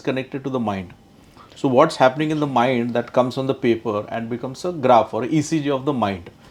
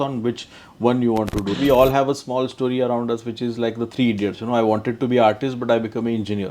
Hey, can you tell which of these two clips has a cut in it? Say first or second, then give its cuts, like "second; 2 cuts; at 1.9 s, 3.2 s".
second; 1 cut; at 1.6 s